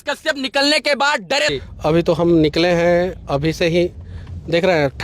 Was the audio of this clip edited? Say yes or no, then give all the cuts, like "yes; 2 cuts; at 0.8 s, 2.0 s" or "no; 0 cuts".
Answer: yes; 1 cut; at 1.5 s